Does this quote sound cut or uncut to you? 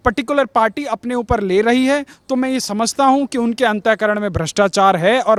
uncut